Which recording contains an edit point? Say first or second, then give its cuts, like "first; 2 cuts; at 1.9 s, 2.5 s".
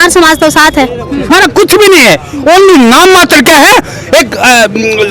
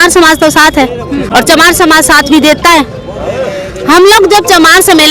first; 1 cut; at 1.3 s